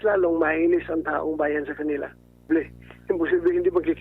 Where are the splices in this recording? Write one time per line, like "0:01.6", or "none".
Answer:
0:02.5